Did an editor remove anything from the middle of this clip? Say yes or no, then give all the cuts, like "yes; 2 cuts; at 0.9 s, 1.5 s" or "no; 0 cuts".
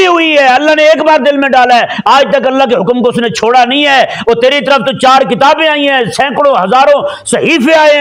no; 0 cuts